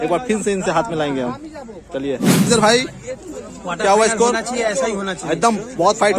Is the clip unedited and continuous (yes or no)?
no